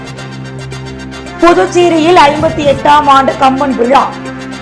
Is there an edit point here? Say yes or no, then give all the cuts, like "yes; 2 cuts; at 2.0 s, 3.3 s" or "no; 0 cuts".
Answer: yes; 1 cut; at 0.9 s